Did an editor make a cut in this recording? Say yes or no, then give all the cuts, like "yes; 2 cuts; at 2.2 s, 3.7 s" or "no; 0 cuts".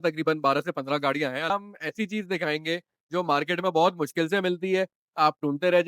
yes; 1 cut; at 1.5 s